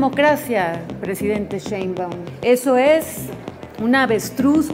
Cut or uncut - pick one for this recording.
cut